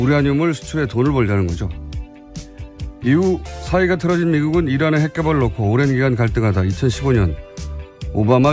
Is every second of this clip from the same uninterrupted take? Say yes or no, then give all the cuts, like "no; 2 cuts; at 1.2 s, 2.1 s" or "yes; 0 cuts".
yes; 0 cuts